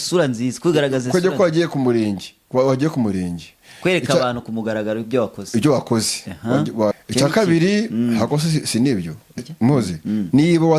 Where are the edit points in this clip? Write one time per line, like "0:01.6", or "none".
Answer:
0:06.9
0:09.3